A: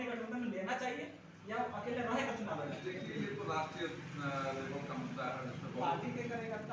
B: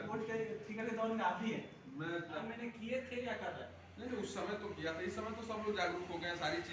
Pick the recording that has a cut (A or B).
B